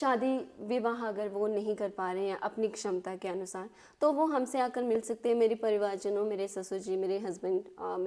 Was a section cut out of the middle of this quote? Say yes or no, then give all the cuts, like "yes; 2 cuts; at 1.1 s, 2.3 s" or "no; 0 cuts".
no; 0 cuts